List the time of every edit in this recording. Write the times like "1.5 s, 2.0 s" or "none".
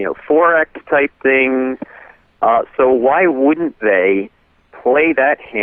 none

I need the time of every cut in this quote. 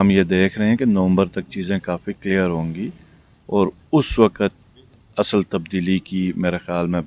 none

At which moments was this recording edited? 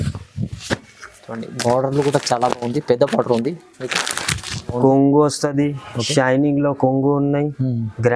4.7 s

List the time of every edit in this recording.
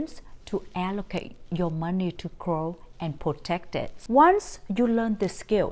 4.0 s

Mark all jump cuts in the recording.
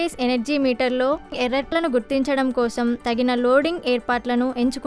1.6 s, 3.0 s

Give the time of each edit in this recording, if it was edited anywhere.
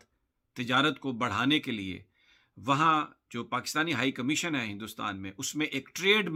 none

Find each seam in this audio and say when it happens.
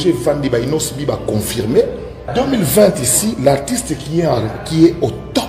2.2 s

